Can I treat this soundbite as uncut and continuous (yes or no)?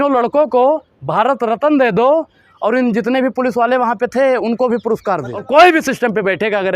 no